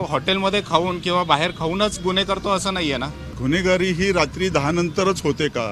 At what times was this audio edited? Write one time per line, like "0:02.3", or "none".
0:03.3